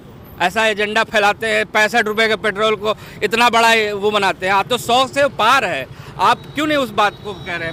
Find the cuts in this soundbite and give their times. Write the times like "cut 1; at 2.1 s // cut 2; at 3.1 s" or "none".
none